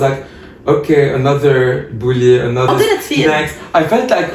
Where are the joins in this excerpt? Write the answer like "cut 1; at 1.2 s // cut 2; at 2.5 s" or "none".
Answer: cut 1; at 2.7 s